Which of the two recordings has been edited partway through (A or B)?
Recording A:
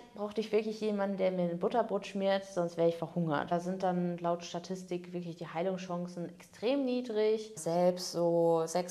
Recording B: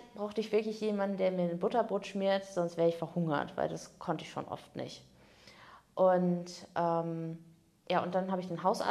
A